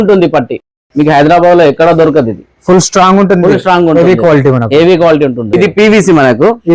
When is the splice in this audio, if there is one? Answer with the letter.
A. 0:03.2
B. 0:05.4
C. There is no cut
B